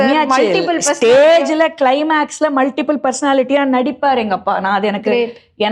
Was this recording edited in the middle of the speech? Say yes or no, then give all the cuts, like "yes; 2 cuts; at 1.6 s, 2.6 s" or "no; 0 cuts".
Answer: no; 0 cuts